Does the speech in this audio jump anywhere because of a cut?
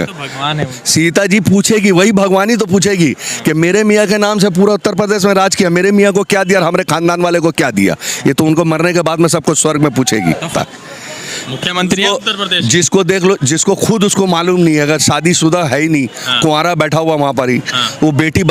yes; 1 cut; at 10.4 s

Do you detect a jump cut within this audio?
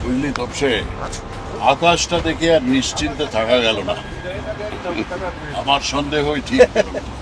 yes; 1 cut; at 1.5 s

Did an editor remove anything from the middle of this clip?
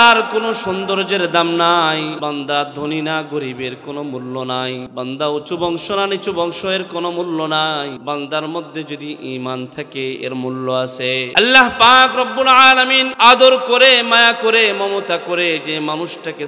yes; 5 cuts; at 2.2 s, 4.9 s, 8.0 s, 11.3 s, 13.1 s

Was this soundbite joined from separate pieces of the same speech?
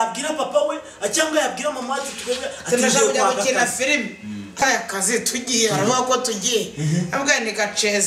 yes; 1 cut; at 4.6 s

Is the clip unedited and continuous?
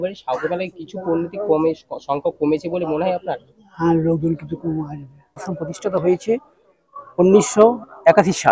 no; 1 cut; at 5.5 s

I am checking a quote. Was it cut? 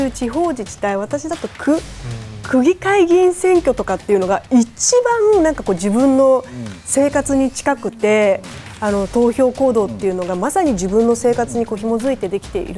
no; 0 cuts

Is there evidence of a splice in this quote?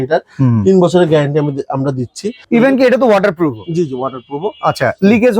yes; 1 cut; at 2.4 s

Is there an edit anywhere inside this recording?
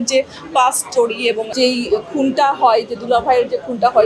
yes; 1 cut; at 1.5 s

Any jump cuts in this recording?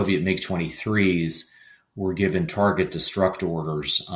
no; 0 cuts

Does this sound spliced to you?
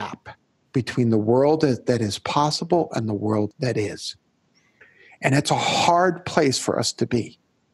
yes; 1 cut; at 3.5 s

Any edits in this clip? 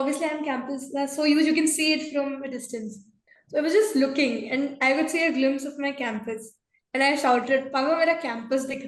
no; 0 cuts

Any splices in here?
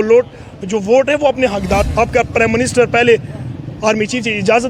yes; 1 cut; at 1.9 s

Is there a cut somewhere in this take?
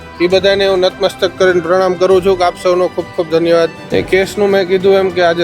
yes; 1 cut; at 3.8 s

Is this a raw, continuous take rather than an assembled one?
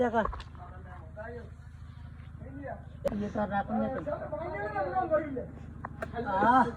no; 1 cut; at 2.9 s

